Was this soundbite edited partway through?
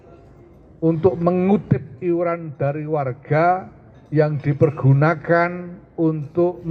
no; 0 cuts

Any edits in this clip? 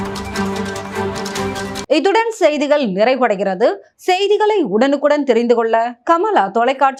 no; 0 cuts

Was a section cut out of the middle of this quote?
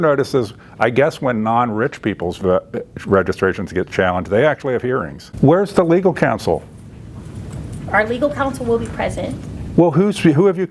yes; 1 cut; at 5.2 s

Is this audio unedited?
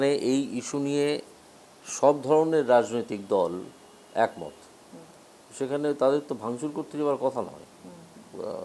yes; 0 cuts

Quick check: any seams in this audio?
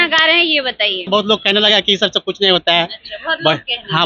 yes; 1 cut; at 1.0 s

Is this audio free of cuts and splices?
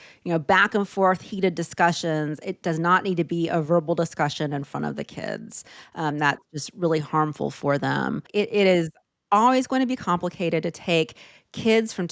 no; 1 cut; at 8.2 s

